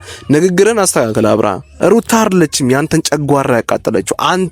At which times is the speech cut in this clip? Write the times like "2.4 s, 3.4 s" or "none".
1.6 s